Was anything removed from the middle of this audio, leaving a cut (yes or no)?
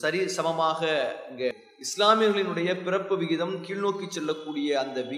yes